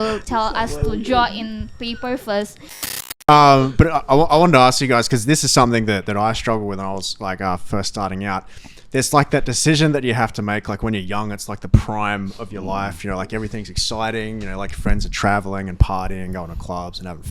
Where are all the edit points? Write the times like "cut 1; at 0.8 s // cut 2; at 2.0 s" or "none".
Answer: cut 1; at 3.0 s